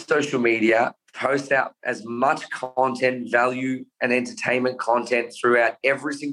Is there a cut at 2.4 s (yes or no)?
no